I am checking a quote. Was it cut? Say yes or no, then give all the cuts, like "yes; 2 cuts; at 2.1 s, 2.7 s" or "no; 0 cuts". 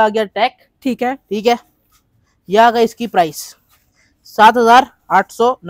no; 0 cuts